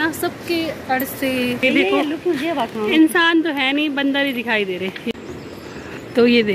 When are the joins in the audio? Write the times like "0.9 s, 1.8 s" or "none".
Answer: 1.6 s, 5.1 s

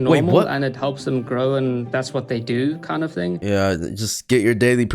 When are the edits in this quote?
3.4 s

